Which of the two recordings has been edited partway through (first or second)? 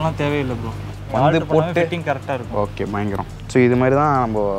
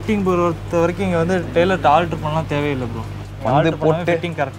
first